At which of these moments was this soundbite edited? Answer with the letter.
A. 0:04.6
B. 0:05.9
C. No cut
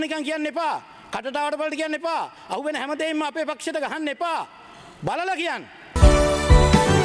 B